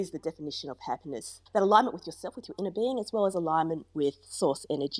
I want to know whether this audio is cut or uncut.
cut